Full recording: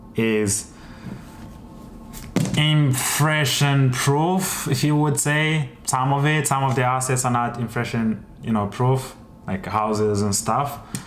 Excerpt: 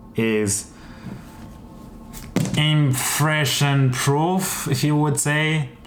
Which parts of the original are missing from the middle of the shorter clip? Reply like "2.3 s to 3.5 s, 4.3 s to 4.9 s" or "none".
none